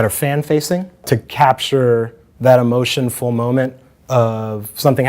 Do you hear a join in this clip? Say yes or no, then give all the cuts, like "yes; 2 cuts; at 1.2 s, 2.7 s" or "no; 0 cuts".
yes; 1 cut; at 1.0 s